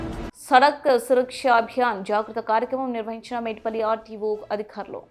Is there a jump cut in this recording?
no; 0 cuts

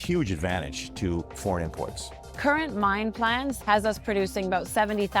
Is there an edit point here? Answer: yes; 1 cut; at 2.3 s

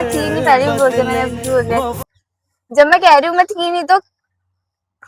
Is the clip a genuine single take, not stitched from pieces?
no; 1 cut; at 2.0 s

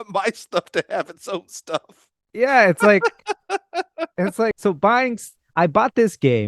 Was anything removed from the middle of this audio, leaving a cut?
yes; 1 cut; at 4.6 s

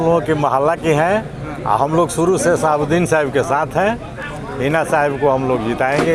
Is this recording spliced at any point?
no; 0 cuts

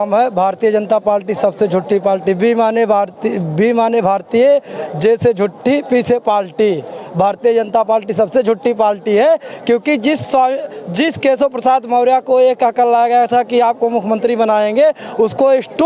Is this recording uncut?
yes; 0 cuts

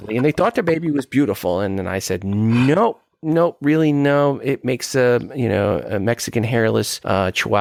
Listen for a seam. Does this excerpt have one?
no; 0 cuts

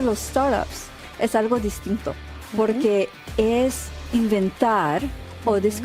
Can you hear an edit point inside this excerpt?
yes; 1 cut; at 4.1 s

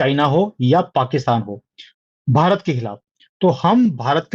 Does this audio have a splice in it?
no; 0 cuts

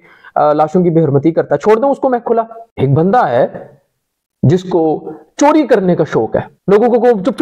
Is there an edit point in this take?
yes; 2 cuts; at 2.6 s, 6.5 s

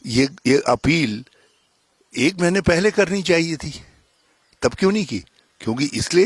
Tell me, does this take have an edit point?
no; 0 cuts

